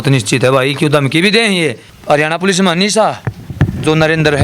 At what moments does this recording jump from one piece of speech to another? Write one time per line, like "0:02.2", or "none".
0:01.9